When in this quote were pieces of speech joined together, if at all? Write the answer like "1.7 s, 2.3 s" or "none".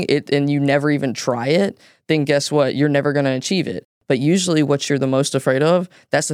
3.9 s